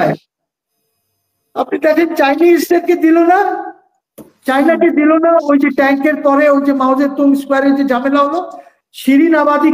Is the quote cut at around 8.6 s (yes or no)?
no